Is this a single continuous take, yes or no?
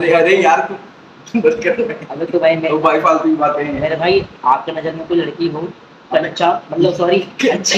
yes